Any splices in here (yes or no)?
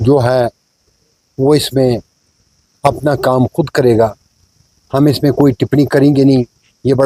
no